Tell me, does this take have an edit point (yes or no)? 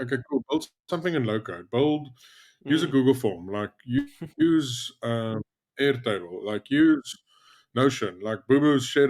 no